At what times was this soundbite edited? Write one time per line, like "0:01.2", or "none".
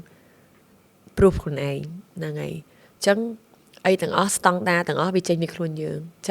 none